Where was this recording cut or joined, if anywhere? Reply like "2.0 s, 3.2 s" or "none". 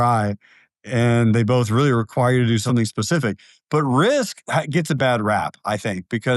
2.6 s, 5.0 s